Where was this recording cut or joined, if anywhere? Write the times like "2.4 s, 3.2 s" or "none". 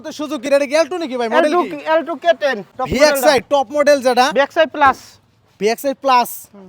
2.7 s